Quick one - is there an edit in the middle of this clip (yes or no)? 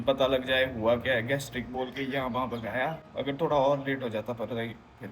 yes